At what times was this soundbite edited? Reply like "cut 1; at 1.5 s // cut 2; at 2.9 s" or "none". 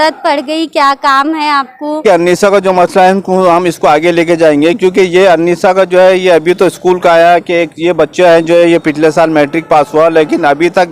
cut 1; at 2.0 s